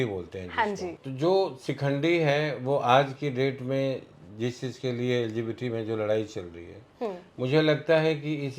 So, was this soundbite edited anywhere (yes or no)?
yes